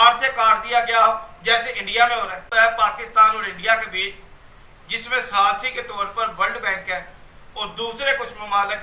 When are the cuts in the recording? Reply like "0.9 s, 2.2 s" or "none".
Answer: 2.5 s

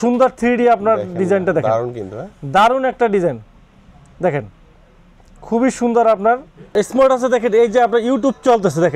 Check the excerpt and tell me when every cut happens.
6.8 s

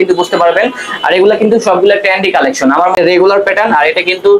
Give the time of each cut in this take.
3.0 s

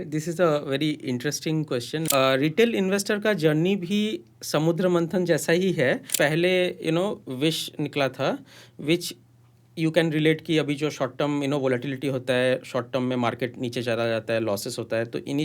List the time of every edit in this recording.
2.0 s, 6.1 s

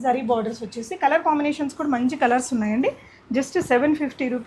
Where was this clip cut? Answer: none

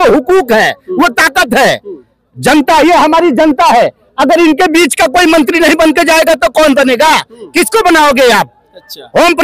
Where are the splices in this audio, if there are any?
none

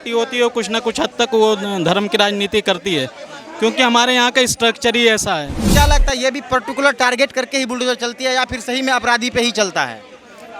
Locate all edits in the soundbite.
5.7 s

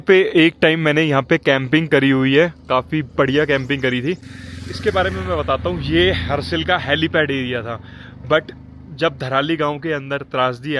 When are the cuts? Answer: none

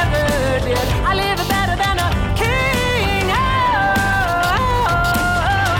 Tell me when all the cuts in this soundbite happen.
none

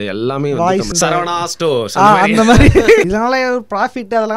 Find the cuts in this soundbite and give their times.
0.9 s, 3.1 s

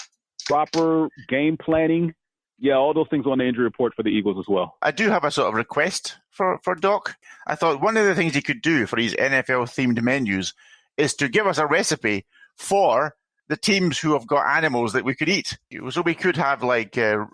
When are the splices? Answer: 4.8 s, 7.2 s, 15.8 s

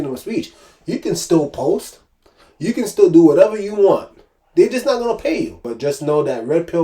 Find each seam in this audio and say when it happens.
5.7 s

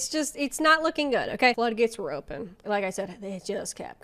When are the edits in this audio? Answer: 1.5 s, 2.6 s

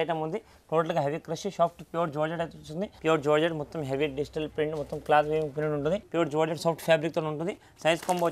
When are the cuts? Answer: 2.9 s, 6.1 s

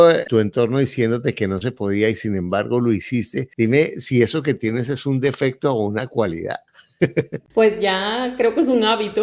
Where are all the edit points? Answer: none

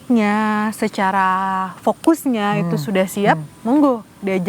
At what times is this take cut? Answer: none

